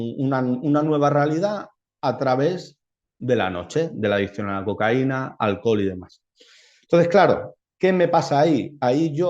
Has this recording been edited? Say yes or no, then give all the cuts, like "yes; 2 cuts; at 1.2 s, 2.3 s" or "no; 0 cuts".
no; 0 cuts